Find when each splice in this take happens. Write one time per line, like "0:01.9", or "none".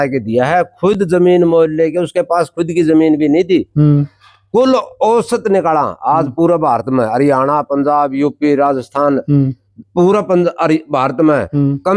none

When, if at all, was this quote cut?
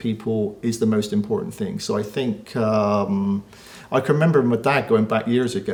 none

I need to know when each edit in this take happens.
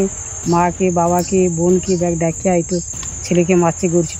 none

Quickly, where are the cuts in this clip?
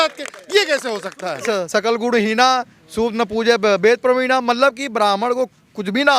0:01.4

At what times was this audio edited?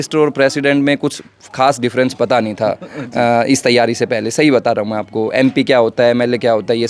none

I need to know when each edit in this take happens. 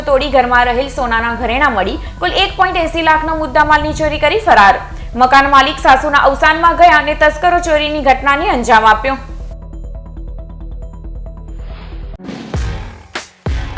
0:12.0

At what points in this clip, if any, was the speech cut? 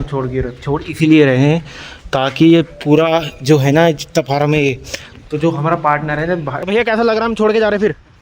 0:06.6

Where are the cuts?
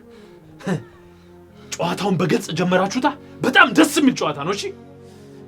none

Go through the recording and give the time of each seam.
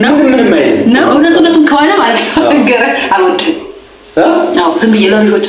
0:01.1

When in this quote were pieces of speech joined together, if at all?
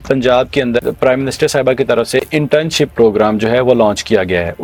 none

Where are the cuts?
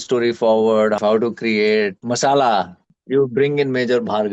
0:01.0
0:02.0
0:02.9

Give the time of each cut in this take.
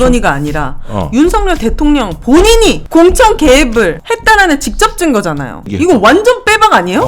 0:05.7

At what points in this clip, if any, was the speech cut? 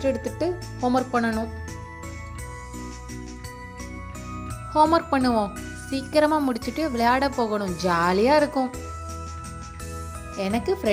none

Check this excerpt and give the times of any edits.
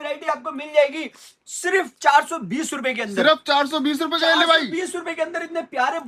none

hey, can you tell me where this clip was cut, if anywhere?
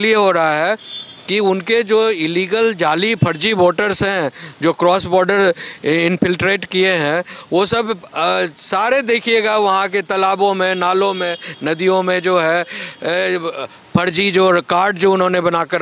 none

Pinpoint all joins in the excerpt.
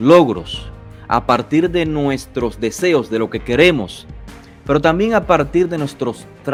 none

